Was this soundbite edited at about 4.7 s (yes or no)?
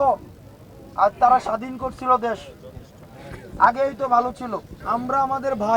yes